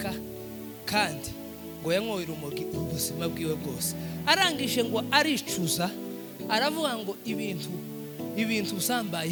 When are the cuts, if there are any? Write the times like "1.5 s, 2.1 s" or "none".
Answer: none